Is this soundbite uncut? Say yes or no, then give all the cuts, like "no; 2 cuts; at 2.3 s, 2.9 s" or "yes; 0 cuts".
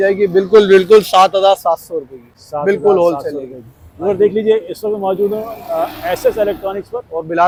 yes; 0 cuts